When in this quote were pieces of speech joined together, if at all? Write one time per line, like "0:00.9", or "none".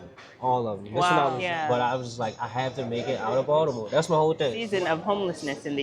0:01.4
0:04.6